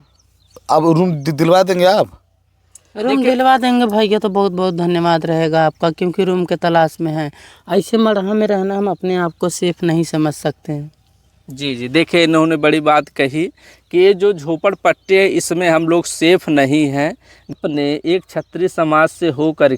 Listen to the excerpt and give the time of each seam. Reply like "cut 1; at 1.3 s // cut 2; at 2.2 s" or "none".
cut 1; at 17.5 s